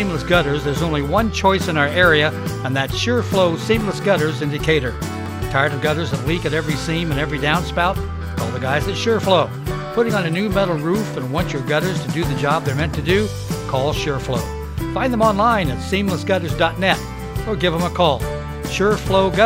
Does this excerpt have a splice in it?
no; 0 cuts

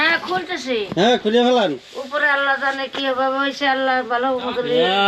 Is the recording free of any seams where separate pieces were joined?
yes; 0 cuts

